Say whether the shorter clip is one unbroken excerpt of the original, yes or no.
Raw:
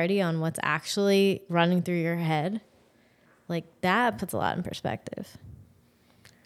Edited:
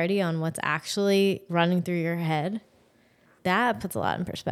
no